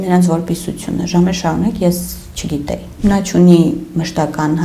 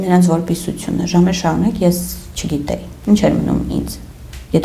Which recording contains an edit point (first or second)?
first